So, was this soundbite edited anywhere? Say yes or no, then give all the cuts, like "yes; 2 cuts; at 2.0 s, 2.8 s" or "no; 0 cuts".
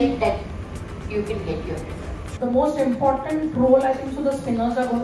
yes; 1 cut; at 2.3 s